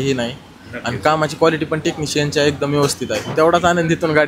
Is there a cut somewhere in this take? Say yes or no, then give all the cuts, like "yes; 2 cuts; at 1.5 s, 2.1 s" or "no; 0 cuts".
yes; 1 cut; at 3.3 s